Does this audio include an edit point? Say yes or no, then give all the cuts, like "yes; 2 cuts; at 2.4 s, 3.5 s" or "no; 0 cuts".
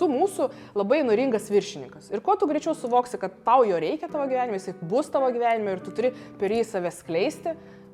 no; 0 cuts